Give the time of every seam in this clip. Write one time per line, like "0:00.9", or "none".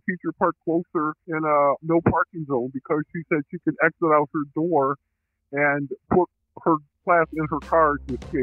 0:01.2
0:07.0